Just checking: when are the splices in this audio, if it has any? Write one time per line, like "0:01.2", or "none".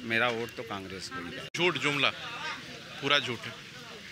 0:01.5